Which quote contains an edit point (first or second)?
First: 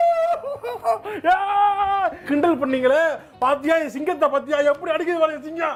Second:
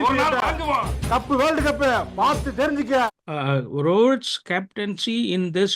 second